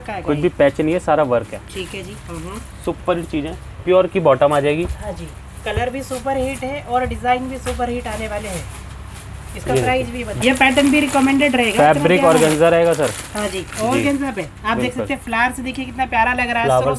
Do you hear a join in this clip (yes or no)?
yes